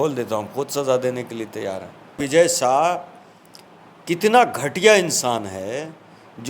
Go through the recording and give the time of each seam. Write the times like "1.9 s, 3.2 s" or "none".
2.2 s